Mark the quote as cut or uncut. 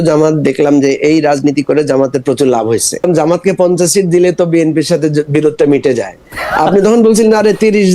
cut